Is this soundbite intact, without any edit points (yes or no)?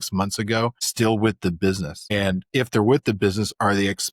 no